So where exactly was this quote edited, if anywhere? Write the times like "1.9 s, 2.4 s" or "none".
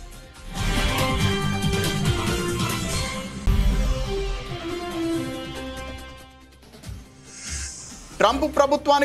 7.8 s